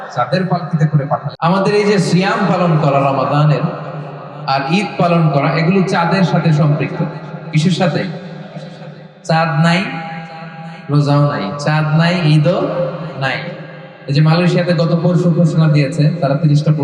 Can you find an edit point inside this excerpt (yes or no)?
yes